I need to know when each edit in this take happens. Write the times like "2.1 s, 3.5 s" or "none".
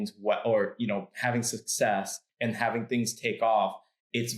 2.2 s